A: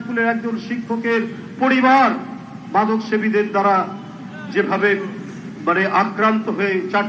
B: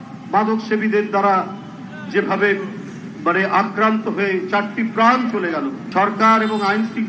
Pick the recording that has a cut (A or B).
B